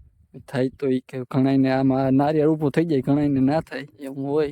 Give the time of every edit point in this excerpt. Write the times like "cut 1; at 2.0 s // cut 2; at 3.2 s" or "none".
none